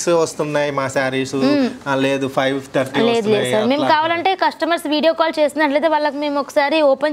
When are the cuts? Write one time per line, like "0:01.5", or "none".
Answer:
none